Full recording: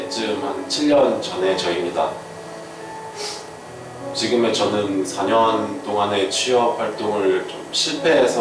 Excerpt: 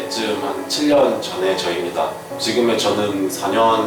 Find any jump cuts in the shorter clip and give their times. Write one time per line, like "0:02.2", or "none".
0:02.3

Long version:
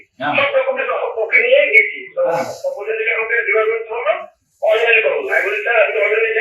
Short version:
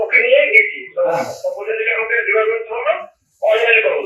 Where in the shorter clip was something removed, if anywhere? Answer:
none

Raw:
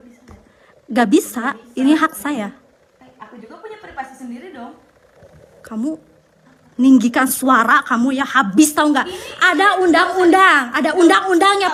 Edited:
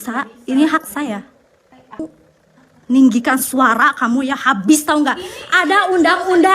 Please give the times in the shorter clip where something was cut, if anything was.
0:02.0

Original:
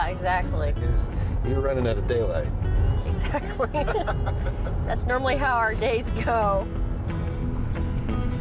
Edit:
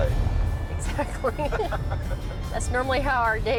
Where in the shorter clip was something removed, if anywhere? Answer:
none

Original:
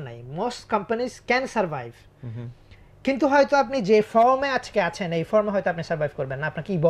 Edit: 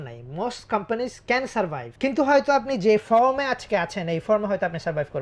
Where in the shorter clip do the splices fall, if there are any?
0:01.8

